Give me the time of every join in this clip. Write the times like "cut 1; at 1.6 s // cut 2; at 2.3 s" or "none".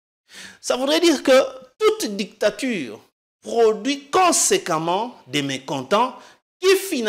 none